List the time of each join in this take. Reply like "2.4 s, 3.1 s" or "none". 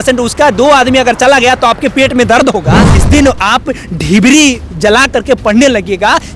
2.9 s